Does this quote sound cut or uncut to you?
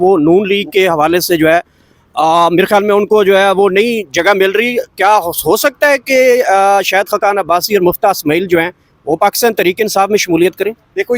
uncut